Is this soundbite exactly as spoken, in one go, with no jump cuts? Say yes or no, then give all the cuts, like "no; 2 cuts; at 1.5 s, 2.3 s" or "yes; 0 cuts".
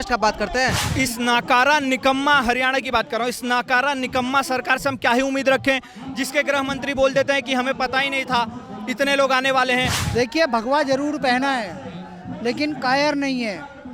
no; 2 cuts; at 0.8 s, 10.0 s